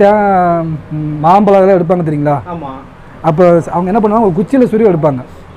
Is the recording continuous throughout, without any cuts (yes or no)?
yes